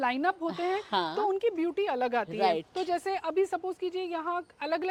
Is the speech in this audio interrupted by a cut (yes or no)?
no